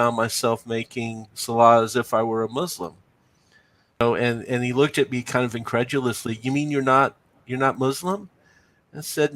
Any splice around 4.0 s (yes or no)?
yes